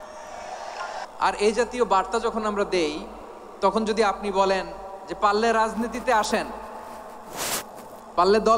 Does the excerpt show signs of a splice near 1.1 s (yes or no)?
yes